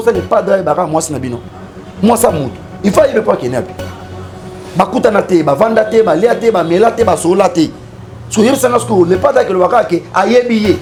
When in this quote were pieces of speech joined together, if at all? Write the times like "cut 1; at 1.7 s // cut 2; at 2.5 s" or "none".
none